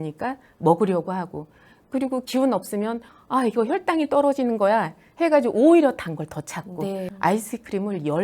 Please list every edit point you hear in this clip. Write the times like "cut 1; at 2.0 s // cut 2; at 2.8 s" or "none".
cut 1; at 7.1 s